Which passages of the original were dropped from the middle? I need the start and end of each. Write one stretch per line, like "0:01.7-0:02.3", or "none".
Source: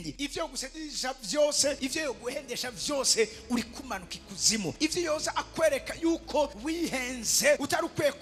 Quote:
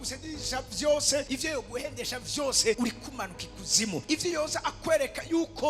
0:03.3-0:03.5